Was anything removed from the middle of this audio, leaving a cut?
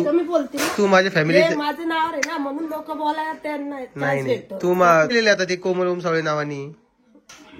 yes; 1 cut; at 5.1 s

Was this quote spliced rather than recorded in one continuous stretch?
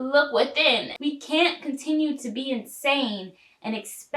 yes; 1 cut; at 0.9 s

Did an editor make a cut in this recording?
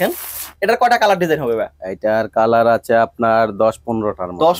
no; 0 cuts

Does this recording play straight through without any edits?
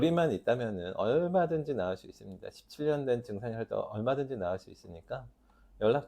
yes; 0 cuts

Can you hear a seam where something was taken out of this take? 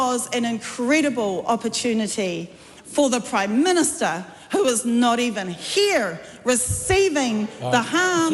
no; 0 cuts

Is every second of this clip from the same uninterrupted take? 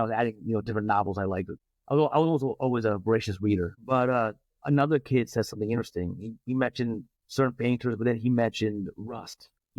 yes; 0 cuts

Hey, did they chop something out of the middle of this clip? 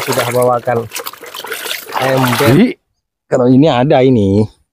yes; 1 cut; at 2.5 s

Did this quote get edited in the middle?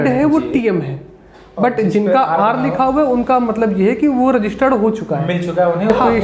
no; 0 cuts

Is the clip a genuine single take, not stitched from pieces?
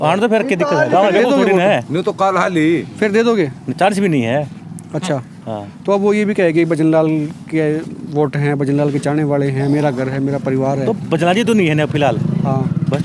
yes; 0 cuts

